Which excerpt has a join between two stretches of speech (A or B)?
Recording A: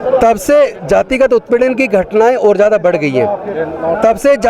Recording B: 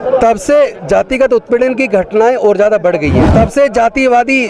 B